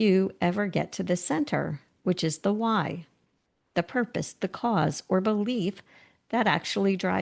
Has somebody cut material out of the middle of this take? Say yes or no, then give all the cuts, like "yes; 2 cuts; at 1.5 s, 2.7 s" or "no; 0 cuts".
no; 0 cuts